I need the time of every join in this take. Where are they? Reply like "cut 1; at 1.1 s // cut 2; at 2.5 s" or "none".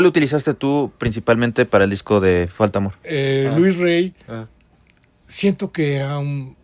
cut 1; at 3.0 s

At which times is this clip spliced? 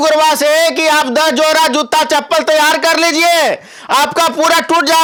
none

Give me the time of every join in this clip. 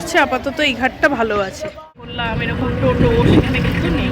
cut 1; at 2.1 s

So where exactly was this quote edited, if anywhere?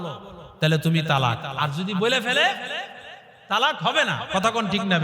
cut 1; at 1.5 s

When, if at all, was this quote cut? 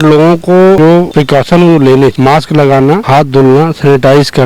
cut 1; at 0.9 s // cut 2; at 2.1 s // cut 3; at 3.0 s

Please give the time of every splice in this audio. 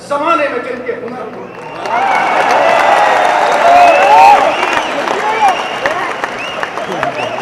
none

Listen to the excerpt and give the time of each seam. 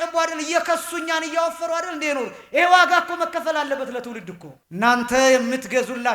cut 1; at 4.6 s

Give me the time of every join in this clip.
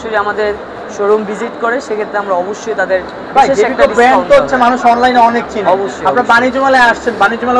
none

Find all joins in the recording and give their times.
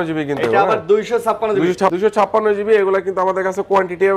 cut 1; at 1.9 s

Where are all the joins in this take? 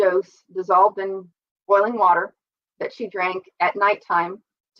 none

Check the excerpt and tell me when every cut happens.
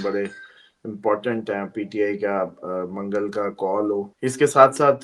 cut 1; at 4.1 s

